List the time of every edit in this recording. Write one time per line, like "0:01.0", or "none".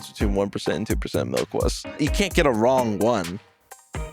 0:02.0